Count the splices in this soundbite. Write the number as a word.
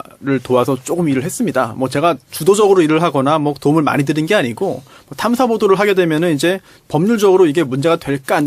zero